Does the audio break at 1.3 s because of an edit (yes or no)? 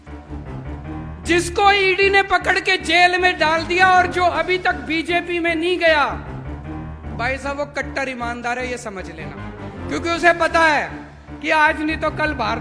yes